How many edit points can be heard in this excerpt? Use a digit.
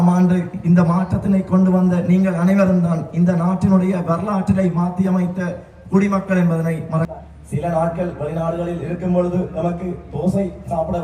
1